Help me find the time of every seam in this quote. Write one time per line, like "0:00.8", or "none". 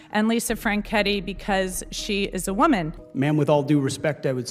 0:03.0